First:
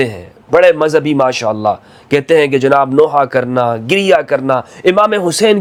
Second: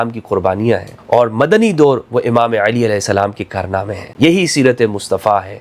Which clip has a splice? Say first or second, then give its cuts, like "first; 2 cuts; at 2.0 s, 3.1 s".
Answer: second; 2 cuts; at 0.9 s, 4.0 s